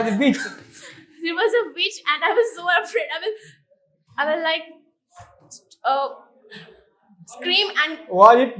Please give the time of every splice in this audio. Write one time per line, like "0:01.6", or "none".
none